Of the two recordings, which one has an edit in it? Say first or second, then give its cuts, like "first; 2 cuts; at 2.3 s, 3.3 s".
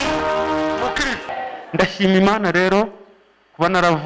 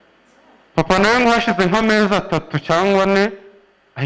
first; 1 cut; at 1.4 s